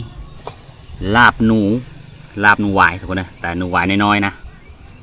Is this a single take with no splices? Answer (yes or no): yes